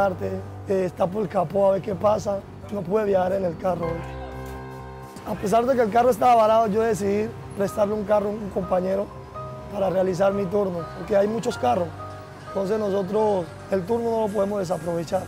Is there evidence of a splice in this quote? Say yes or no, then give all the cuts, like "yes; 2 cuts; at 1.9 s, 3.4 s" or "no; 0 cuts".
yes; 2 cuts; at 4.6 s, 10.9 s